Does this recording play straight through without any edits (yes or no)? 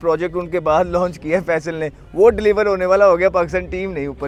yes